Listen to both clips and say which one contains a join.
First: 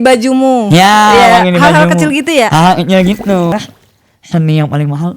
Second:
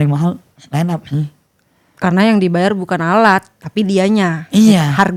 first; 1 cut; at 3.5 s

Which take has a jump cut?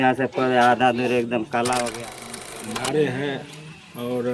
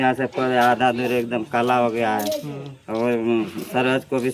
first; 1 cut; at 2.2 s

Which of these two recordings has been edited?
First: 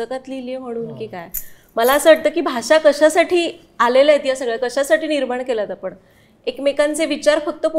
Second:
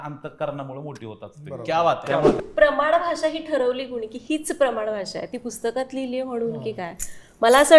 second; 1 cut; at 2.3 s

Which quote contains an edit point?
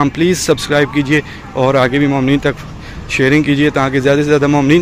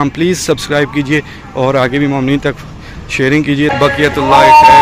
second; 1 cut; at 3.7 s

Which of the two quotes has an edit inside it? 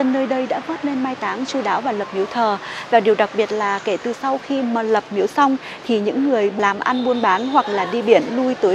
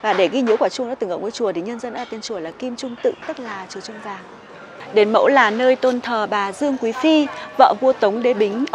second; 1 cut; at 4.8 s

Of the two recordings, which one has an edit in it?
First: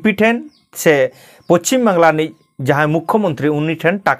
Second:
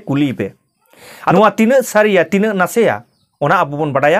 second; 1 cut; at 1.3 s

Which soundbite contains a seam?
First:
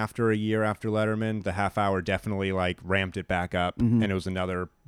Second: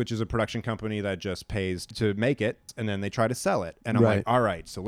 second; 2 cuts; at 1.9 s, 2.7 s

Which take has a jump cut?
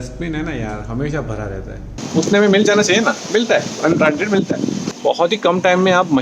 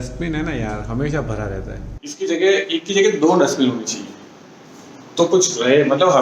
first; 2 cuts; at 1.9 s, 4.8 s

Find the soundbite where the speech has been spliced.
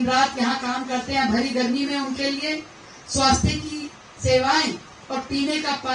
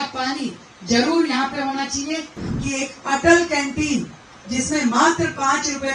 second; 1 cut; at 2.4 s

